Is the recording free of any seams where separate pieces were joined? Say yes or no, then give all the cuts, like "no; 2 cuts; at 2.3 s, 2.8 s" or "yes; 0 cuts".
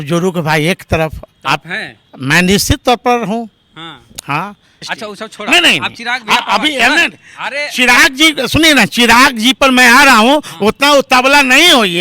no; 1 cut; at 4.9 s